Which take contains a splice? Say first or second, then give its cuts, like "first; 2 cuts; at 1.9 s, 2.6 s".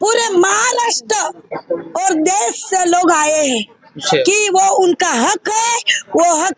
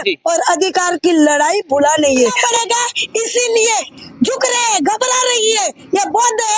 second; 1 cut; at 2.4 s